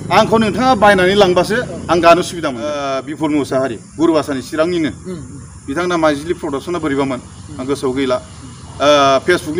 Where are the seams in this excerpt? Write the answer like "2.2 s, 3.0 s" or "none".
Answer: 2.8 s